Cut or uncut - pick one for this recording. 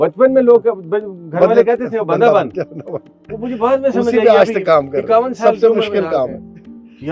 uncut